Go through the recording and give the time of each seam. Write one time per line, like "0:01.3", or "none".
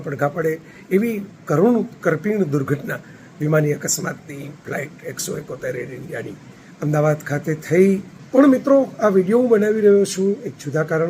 0:08.1